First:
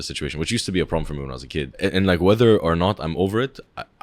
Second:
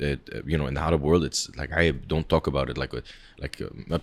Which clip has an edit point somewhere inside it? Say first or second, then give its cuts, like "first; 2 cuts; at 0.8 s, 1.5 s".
first; 1 cut; at 1.7 s